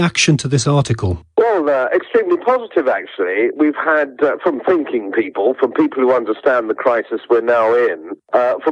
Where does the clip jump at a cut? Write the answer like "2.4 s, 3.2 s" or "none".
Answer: 2.5 s